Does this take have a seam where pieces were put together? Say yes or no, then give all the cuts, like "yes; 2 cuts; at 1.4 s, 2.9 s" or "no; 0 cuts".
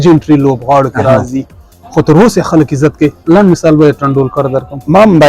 yes; 1 cut; at 1.8 s